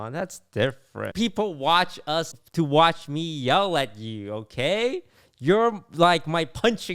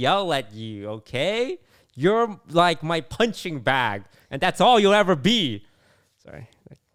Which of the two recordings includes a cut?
first; 2 cuts; at 1.1 s, 2.4 s

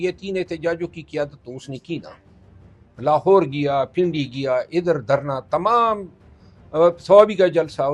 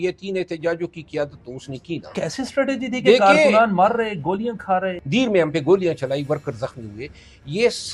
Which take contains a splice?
second; 2 cuts; at 2.1 s, 5.0 s

